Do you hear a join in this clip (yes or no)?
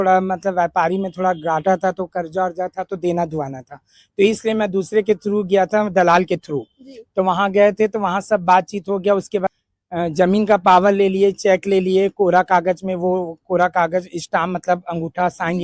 yes